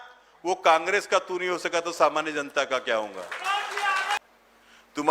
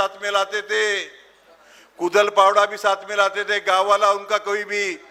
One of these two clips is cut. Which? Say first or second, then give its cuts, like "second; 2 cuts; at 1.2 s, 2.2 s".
first; 1 cut; at 4.2 s